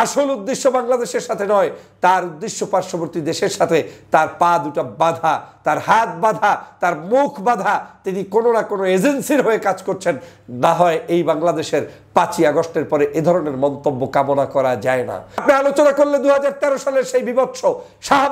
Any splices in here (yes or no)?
yes